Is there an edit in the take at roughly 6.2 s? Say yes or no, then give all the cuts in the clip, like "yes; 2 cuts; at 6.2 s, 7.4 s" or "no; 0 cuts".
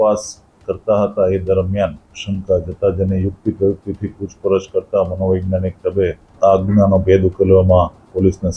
yes; 2 cuts; at 2.1 s, 6.2 s